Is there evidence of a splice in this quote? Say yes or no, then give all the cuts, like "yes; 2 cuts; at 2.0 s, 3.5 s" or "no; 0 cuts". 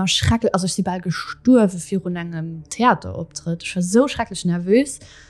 no; 0 cuts